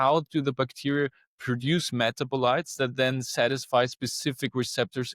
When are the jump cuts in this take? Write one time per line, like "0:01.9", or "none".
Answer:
none